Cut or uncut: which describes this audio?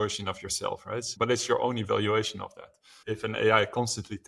cut